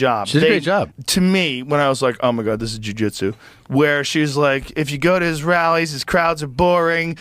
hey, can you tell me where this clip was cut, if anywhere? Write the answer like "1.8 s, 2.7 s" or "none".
1.0 s